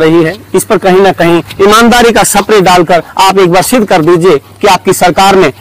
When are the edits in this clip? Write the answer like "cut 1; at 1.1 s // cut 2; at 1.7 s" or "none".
none